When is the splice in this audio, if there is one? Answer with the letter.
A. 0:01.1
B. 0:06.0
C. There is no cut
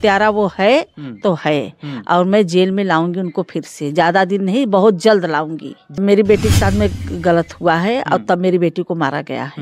B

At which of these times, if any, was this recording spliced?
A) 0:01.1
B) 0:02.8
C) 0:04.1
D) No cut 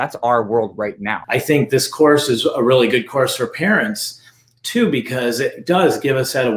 A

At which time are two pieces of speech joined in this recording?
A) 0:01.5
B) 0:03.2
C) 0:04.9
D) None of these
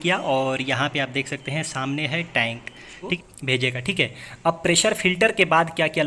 B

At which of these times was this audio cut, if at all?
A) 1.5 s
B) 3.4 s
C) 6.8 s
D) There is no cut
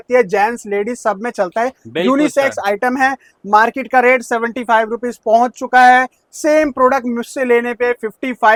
D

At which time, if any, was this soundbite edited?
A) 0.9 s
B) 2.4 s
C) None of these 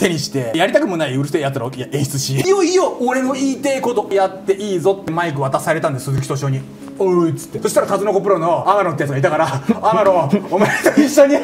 B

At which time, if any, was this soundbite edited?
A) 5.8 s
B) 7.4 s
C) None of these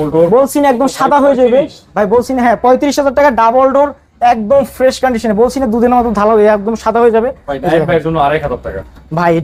C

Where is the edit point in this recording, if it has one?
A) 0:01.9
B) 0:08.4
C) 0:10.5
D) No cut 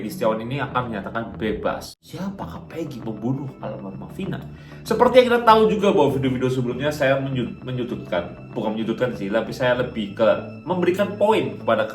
A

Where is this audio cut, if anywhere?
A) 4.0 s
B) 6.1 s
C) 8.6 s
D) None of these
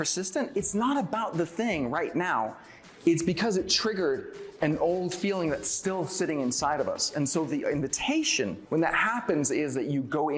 C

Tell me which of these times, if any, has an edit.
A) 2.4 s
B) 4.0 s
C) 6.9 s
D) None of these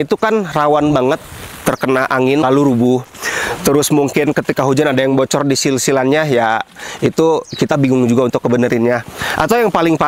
A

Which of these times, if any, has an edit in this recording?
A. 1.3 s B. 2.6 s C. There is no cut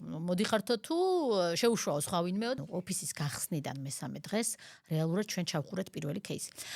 B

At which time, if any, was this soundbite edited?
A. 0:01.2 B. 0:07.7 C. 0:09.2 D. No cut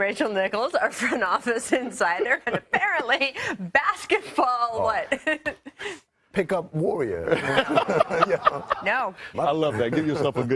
B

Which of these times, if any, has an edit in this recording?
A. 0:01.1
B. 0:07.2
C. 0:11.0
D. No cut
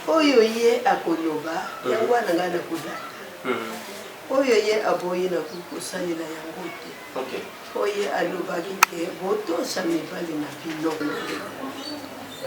C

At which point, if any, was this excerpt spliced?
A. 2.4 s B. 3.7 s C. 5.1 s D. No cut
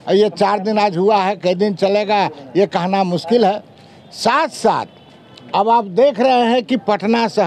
D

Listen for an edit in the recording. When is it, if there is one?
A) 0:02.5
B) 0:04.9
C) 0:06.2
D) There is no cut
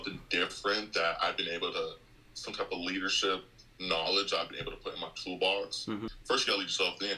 C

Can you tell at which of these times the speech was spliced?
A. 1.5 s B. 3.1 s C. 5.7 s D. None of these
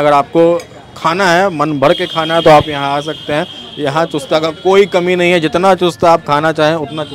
D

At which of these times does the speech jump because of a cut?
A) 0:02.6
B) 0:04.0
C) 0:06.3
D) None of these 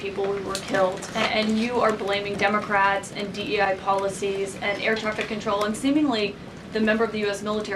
A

